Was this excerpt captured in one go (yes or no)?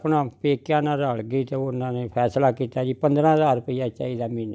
yes